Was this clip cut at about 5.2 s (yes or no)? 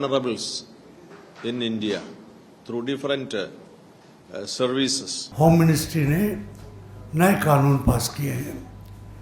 yes